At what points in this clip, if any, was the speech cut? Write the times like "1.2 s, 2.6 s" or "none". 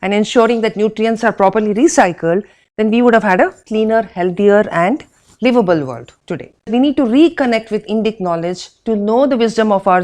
6.7 s